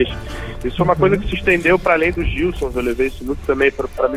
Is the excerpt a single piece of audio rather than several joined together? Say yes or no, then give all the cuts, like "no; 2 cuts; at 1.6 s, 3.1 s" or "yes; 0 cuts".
yes; 0 cuts